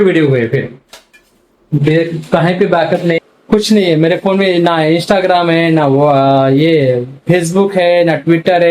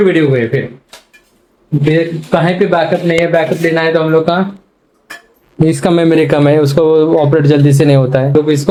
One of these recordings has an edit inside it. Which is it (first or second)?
first